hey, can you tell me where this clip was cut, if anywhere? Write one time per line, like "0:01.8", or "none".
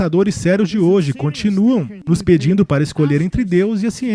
0:01.9